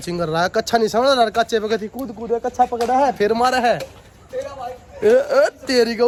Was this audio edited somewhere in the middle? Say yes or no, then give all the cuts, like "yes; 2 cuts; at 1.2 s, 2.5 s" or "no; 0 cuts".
no; 0 cuts